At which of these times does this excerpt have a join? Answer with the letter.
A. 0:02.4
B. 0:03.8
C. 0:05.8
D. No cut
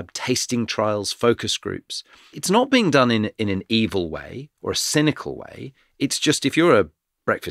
A